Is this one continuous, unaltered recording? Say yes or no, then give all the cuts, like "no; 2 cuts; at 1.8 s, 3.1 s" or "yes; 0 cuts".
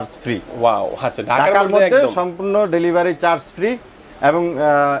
yes; 0 cuts